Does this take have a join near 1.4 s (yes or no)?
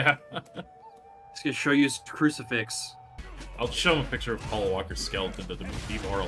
no